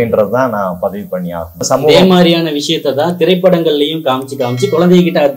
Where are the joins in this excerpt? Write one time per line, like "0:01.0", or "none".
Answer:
0:01.6